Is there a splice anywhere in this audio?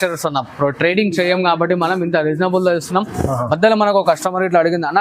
no; 0 cuts

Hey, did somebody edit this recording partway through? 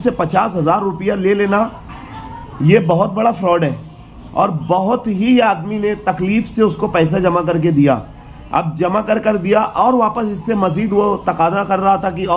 no; 0 cuts

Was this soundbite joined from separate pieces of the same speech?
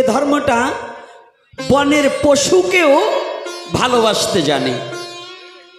no; 0 cuts

